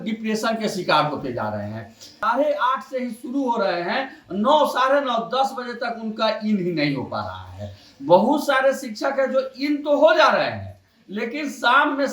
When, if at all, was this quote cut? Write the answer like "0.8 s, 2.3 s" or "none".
2.2 s